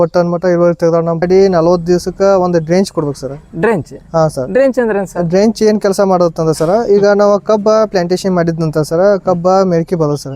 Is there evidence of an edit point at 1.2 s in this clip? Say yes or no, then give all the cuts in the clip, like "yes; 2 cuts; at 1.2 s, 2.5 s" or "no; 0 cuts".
yes; 1 cut; at 1.2 s